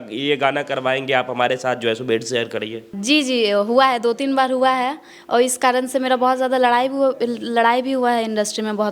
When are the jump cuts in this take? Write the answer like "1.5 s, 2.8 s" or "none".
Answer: 2.9 s